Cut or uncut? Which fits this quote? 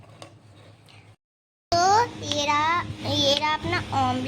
cut